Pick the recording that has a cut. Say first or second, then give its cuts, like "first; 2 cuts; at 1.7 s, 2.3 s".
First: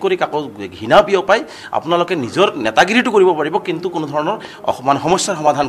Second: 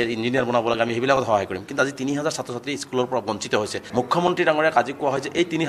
second; 1 cut; at 3.8 s